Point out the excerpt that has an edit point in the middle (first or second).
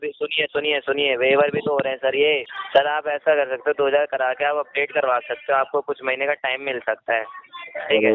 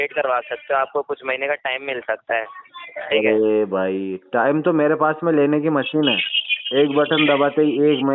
first